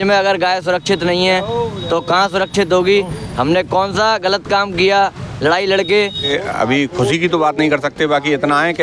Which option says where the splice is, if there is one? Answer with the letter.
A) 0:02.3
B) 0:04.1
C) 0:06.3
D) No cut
C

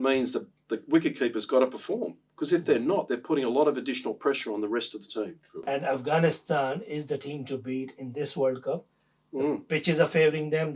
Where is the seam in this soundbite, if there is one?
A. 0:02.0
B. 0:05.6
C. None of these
B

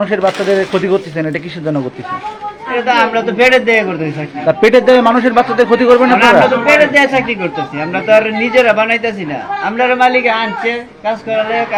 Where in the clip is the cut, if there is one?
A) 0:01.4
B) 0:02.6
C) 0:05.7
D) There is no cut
D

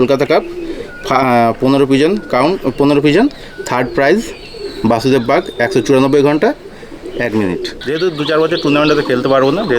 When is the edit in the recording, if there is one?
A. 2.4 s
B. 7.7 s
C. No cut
B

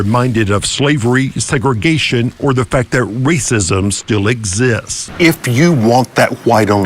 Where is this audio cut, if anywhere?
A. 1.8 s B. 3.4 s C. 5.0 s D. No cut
C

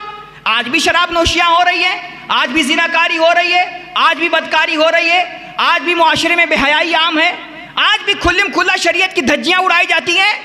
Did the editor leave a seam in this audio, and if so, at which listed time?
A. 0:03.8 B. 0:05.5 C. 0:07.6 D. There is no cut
D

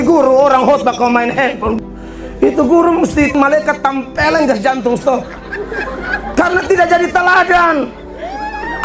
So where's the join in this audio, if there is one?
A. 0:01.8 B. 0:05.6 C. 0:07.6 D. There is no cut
A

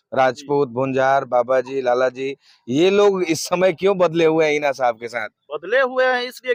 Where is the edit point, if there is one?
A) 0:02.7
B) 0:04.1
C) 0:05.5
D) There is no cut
D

